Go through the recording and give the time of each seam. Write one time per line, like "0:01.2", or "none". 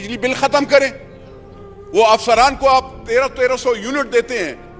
none